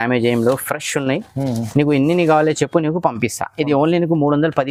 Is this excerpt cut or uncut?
uncut